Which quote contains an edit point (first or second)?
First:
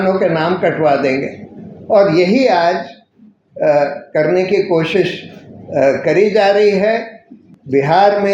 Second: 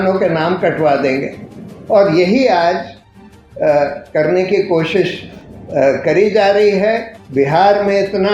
second